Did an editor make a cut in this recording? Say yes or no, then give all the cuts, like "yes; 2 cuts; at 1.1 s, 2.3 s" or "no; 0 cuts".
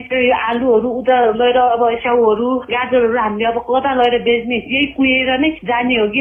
no; 0 cuts